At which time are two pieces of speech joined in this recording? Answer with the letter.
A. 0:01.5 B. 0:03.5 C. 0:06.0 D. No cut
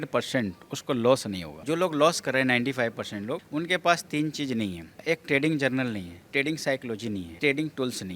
A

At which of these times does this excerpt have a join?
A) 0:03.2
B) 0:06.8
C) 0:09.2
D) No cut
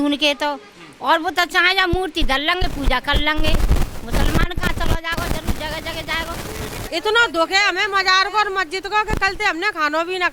B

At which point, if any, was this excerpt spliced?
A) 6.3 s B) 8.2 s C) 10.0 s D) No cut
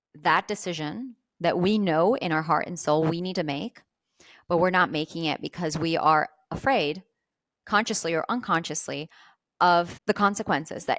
C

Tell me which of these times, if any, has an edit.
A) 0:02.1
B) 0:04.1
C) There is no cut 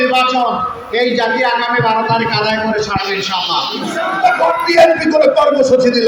B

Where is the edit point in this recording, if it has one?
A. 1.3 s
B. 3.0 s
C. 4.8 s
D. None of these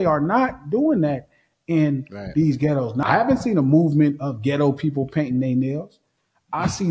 B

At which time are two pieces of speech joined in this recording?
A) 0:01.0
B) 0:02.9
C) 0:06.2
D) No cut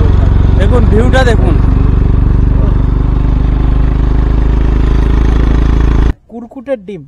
C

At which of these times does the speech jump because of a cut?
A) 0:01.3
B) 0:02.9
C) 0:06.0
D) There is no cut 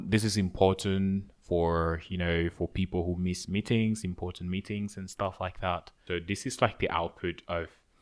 C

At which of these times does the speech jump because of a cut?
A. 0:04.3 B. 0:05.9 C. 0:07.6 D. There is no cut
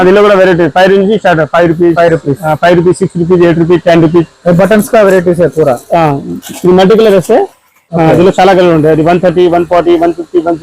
A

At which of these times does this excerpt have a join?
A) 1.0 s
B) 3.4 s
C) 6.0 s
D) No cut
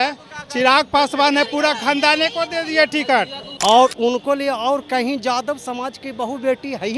B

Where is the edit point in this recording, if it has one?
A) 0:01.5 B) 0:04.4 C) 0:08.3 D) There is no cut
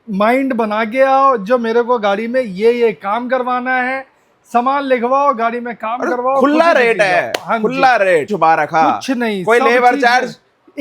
C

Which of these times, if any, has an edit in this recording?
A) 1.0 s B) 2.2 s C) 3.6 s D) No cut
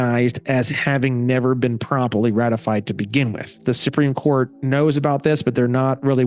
C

